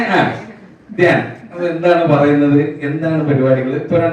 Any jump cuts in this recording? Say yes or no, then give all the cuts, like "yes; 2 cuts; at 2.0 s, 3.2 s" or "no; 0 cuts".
no; 0 cuts